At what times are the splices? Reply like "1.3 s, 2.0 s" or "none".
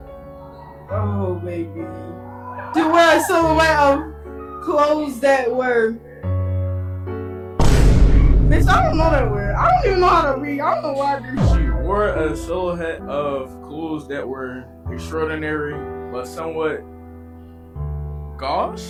none